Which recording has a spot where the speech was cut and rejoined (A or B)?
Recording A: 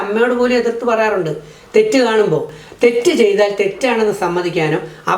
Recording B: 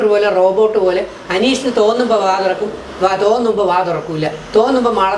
A